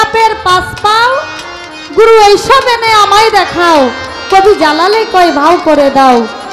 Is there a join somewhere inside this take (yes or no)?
no